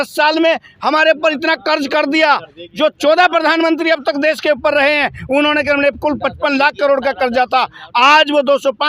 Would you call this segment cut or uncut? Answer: uncut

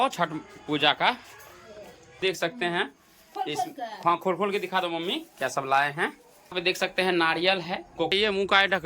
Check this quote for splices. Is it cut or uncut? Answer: cut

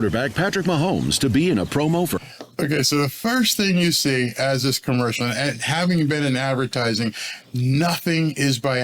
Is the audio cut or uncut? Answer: uncut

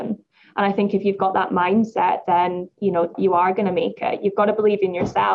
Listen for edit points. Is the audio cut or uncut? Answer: cut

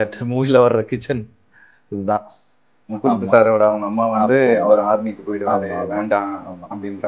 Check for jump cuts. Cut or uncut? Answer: cut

